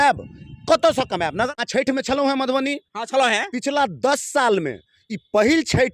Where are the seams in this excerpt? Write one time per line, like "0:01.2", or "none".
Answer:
0:01.5

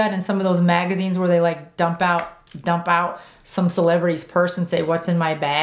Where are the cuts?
none

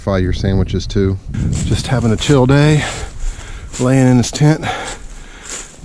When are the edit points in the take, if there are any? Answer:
0:01.3

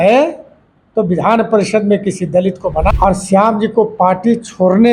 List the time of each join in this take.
0:02.9

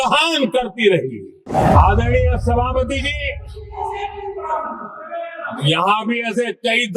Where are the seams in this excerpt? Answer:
0:01.4

